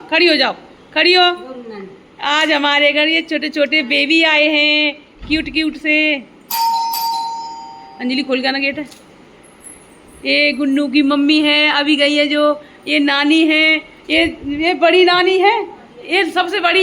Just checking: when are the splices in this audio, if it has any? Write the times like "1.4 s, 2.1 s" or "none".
none